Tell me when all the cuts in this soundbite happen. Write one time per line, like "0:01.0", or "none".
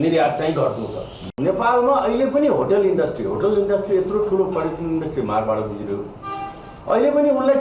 0:01.3